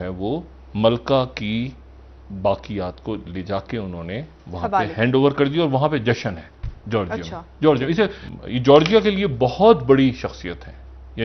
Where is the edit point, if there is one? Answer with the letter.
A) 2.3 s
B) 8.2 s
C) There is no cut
B